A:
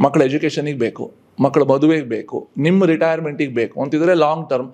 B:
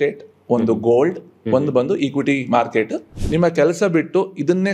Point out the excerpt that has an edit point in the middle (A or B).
B